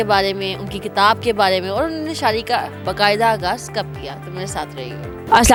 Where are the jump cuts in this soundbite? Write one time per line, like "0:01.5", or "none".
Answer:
none